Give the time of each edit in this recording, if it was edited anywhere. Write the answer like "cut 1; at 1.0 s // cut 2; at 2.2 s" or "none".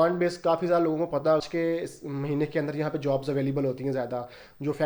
cut 1; at 1.4 s